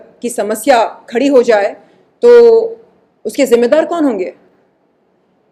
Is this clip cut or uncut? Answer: uncut